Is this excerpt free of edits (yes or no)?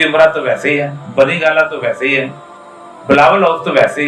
yes